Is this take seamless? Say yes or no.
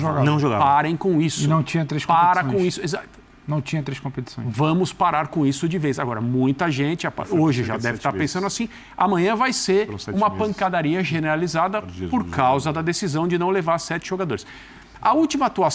yes